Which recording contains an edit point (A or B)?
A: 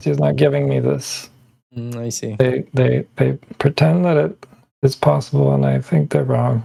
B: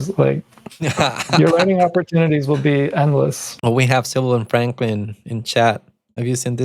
B